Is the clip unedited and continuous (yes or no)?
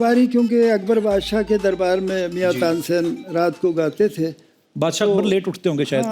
yes